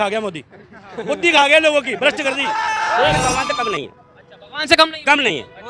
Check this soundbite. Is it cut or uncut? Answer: cut